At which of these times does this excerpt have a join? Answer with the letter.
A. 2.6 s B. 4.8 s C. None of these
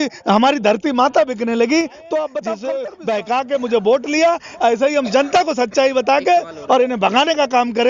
A